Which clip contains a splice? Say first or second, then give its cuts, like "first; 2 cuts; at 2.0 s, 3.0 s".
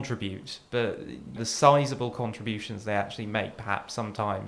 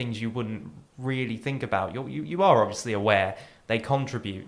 first; 1 cut; at 1.4 s